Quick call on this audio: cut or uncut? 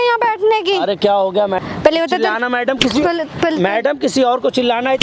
cut